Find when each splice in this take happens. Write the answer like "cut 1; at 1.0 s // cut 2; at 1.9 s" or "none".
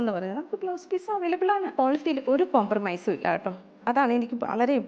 cut 1; at 1.7 s